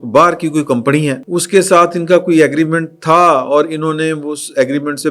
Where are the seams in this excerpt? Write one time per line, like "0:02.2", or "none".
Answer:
0:01.2